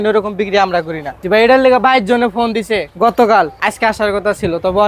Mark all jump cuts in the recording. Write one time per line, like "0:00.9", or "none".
0:01.2
0:02.9
0:03.5